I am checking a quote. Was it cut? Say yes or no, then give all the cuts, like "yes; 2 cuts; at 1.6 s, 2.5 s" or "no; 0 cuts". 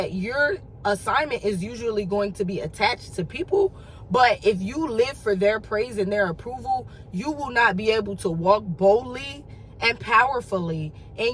no; 0 cuts